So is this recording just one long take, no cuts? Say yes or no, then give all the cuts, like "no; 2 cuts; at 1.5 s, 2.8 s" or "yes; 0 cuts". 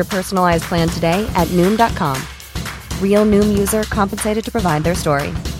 yes; 0 cuts